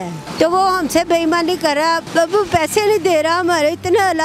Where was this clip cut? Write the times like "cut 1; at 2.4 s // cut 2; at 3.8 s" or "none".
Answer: none